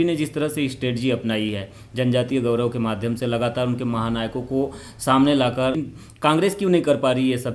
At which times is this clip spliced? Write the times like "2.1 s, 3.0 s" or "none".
6.3 s